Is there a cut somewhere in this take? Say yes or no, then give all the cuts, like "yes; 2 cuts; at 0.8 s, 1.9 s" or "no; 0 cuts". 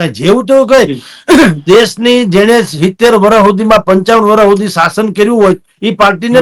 no; 0 cuts